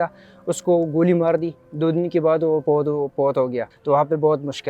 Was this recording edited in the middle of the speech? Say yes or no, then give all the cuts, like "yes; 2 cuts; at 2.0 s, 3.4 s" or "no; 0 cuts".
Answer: yes; 1 cut; at 3.7 s